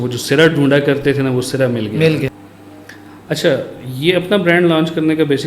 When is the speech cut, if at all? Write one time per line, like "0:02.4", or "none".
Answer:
0:02.4